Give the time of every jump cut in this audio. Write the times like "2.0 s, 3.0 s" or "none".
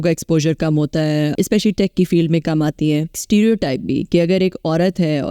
1.3 s, 3.2 s